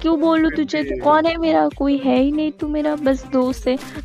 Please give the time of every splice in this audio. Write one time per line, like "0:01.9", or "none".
none